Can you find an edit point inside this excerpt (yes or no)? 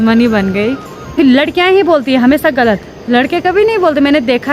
yes